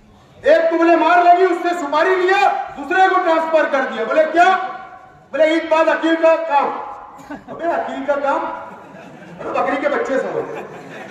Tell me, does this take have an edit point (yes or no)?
no